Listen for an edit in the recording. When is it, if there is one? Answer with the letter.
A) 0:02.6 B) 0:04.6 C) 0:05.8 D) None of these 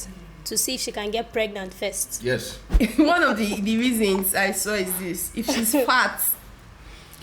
A